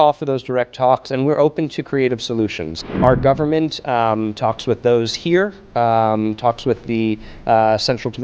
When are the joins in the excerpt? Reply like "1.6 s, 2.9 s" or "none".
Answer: 3.0 s